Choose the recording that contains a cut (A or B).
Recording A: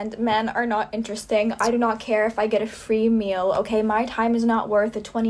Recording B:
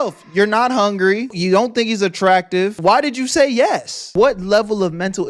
B